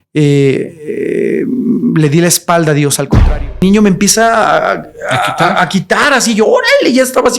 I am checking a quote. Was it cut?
yes; 1 cut; at 3.3 s

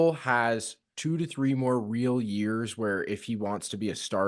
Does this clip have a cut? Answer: no; 0 cuts

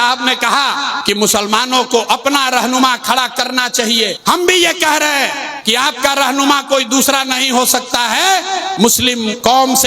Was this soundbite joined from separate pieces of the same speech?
yes; 4 cuts; at 1.0 s, 4.2 s, 5.5 s, 8.8 s

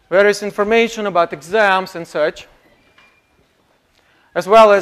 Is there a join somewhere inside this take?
no; 0 cuts

